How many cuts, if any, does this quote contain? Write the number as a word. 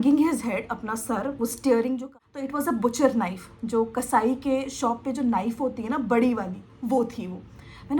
one